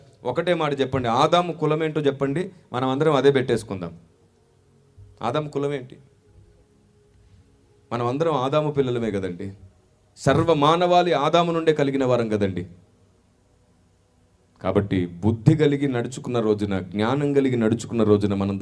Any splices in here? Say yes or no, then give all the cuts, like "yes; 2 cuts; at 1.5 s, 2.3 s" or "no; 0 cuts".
no; 0 cuts